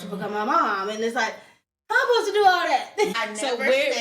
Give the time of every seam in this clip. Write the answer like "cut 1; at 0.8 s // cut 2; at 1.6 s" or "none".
cut 1; at 3.1 s